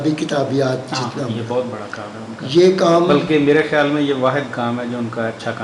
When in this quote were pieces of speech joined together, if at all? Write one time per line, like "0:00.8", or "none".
none